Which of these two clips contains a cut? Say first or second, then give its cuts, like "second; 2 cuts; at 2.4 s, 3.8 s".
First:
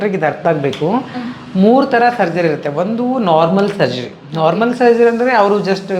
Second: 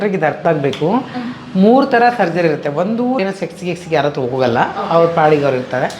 second; 1 cut; at 3.2 s